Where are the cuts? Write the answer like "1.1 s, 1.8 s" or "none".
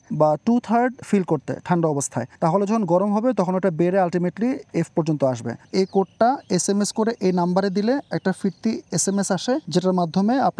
1.0 s, 2.2 s, 5.6 s, 9.7 s